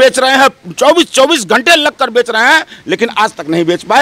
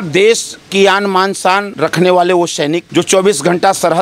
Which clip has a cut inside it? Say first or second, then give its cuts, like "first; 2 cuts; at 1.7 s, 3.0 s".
second; 2 cuts; at 1.7 s, 2.8 s